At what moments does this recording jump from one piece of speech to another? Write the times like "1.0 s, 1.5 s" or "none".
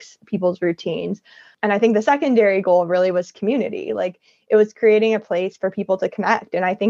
1.5 s